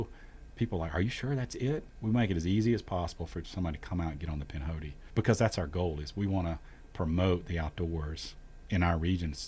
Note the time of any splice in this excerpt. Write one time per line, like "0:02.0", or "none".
0:01.9
0:05.0

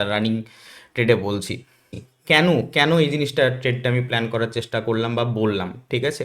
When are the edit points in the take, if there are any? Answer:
0:02.1

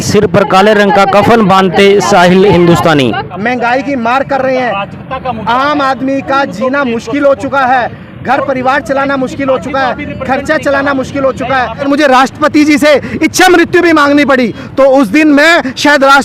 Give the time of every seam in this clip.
0:03.3
0:11.8
0:14.6

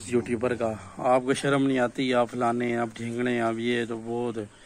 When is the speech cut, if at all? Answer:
none

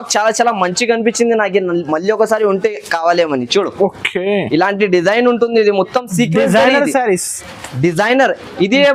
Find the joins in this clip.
none

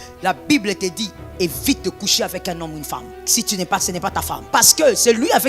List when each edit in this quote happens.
0:03.2
0:04.4

